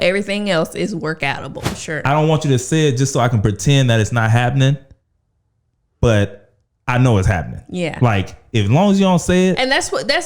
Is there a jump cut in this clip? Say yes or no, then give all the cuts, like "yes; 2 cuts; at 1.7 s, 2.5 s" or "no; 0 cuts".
yes; 1 cut; at 1.7 s